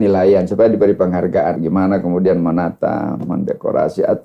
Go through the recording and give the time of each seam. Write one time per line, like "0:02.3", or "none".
0:01.6